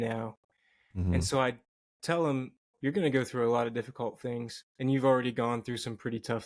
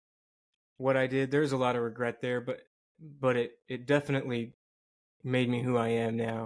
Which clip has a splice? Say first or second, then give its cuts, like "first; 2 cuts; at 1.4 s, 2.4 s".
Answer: first; 1 cut; at 2.7 s